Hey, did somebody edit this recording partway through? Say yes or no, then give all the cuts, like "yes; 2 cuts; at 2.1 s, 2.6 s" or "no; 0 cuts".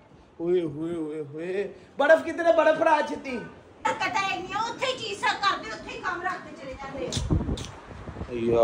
yes; 1 cut; at 3.8 s